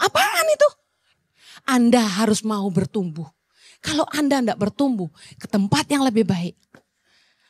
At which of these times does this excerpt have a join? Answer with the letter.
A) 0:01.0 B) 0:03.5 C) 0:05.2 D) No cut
A